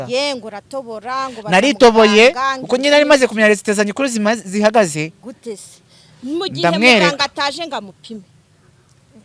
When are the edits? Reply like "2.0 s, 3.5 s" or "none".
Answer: none